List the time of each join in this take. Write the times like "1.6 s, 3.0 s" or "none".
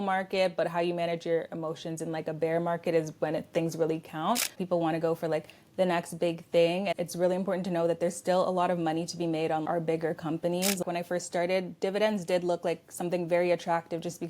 4.6 s, 6.9 s, 10.8 s